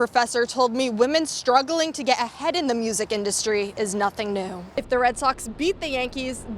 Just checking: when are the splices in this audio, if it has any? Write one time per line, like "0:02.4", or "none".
0:04.6